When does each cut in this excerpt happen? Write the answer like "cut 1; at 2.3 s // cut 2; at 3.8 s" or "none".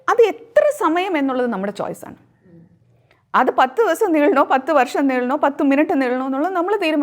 none